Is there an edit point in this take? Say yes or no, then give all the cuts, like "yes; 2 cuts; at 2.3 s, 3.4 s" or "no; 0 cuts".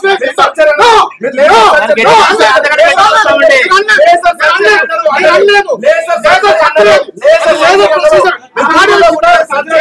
no; 0 cuts